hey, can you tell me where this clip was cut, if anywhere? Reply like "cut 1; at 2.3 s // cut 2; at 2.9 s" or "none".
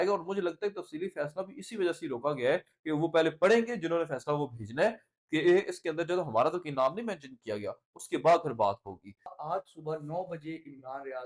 cut 1; at 9.3 s